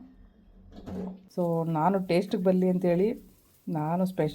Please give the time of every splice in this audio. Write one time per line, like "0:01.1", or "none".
0:01.2